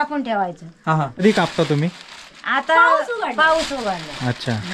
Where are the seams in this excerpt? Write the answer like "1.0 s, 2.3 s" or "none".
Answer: 1.2 s